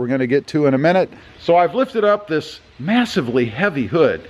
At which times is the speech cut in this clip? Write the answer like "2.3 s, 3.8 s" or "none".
1.3 s